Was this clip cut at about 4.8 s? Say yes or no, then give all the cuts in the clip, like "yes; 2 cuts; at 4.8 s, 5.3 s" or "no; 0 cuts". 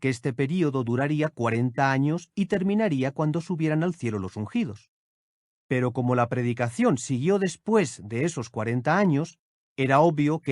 yes; 1 cut; at 4.8 s